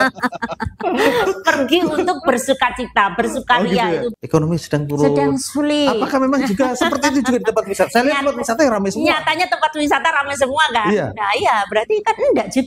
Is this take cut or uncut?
cut